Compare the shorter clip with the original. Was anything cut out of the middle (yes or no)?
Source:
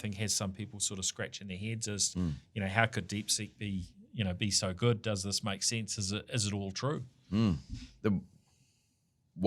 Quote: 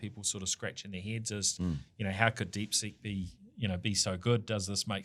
no